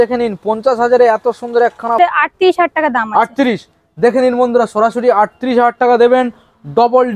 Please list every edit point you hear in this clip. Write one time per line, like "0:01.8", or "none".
0:02.0